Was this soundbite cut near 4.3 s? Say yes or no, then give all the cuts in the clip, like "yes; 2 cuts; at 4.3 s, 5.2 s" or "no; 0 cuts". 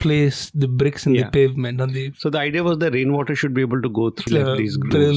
yes; 1 cut; at 4.3 s